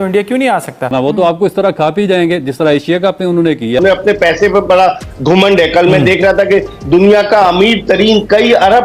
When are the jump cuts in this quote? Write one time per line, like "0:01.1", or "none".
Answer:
0:00.9
0:03.8